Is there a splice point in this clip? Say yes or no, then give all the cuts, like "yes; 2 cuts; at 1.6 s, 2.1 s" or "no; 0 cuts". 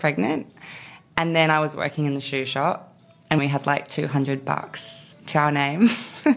yes; 2 cuts; at 3.4 s, 5.2 s